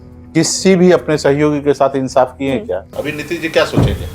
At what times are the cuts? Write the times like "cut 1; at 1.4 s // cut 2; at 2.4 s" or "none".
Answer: cut 1; at 3.0 s